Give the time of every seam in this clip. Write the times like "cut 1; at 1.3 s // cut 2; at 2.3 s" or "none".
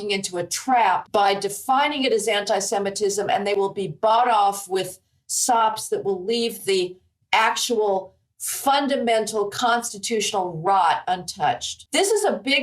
cut 1; at 1.0 s // cut 2; at 11.7 s

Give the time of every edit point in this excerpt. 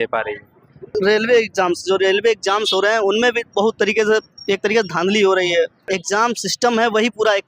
cut 1; at 0.9 s // cut 2; at 5.8 s

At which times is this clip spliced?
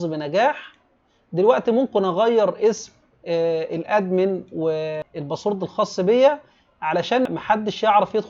cut 1; at 5.0 s // cut 2; at 7.3 s

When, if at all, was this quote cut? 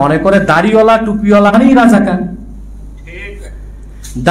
cut 1; at 1.5 s

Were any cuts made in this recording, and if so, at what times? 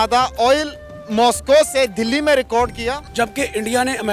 cut 1; at 3.0 s

